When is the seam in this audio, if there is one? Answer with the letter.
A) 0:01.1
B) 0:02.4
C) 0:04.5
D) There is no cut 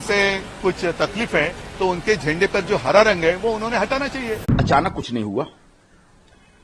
C